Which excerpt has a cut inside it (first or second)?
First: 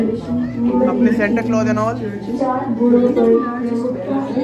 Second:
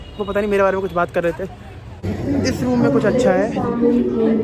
second